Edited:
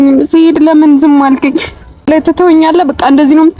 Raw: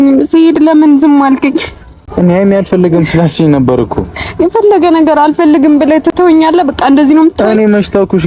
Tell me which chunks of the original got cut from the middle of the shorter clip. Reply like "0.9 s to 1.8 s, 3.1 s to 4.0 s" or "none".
2.1 s to 5.9 s